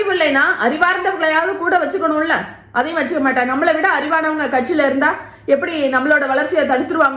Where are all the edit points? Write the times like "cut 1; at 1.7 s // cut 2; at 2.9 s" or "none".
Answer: none